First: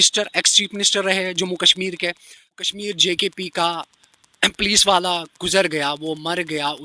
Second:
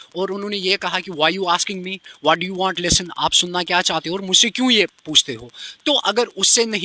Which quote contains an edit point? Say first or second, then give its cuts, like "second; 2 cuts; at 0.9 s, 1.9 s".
first; 1 cut; at 2.7 s